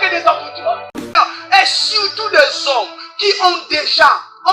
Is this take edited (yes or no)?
yes